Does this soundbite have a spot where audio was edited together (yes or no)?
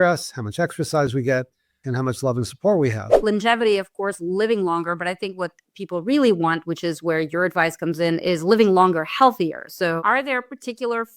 yes